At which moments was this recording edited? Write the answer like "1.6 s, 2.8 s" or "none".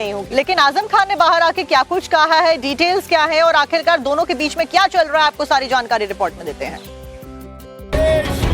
6.4 s